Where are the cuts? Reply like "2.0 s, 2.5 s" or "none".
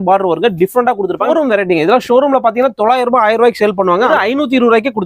1.3 s, 4.1 s